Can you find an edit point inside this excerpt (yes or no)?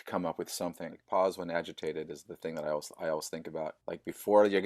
yes